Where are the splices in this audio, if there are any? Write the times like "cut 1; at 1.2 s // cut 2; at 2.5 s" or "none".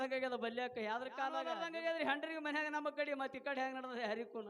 cut 1; at 1.5 s